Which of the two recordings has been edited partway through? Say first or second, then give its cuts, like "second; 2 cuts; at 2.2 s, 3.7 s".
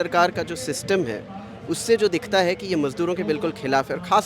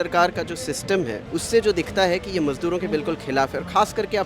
second; 1 cut; at 1.2 s